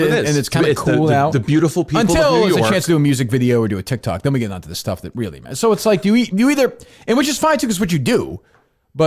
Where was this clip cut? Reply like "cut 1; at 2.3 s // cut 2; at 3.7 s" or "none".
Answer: none